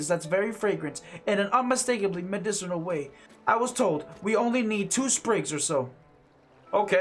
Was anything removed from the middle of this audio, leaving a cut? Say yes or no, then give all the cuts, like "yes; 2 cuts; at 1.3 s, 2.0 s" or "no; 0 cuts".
no; 0 cuts